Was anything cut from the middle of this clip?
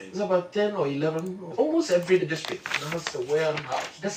yes; 2 cuts; at 1.5 s, 2.2 s

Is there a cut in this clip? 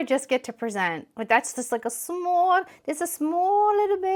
no; 0 cuts

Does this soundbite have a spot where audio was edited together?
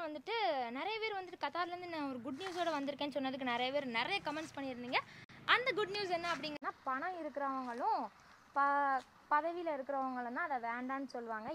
yes; 1 cut; at 6.6 s

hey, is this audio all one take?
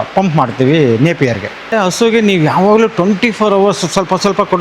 no; 1 cut; at 1.5 s

